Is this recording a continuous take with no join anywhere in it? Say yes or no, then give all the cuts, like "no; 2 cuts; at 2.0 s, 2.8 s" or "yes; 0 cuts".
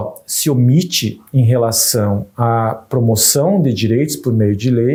yes; 0 cuts